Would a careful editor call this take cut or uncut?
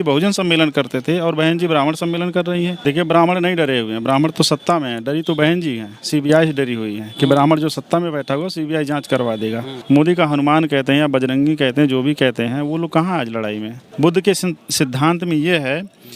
cut